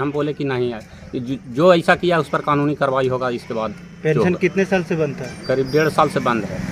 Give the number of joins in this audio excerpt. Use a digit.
0